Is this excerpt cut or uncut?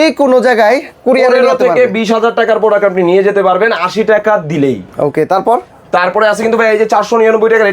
uncut